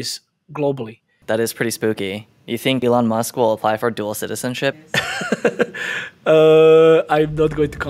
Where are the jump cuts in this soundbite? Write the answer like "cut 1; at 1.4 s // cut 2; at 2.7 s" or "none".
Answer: cut 1; at 1.2 s // cut 2; at 2.8 s